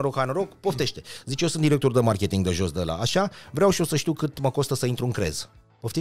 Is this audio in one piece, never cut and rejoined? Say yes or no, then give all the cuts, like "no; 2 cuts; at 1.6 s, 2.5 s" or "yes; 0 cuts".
yes; 0 cuts